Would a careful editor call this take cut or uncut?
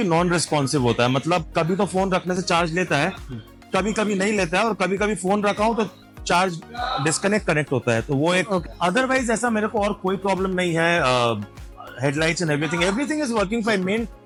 uncut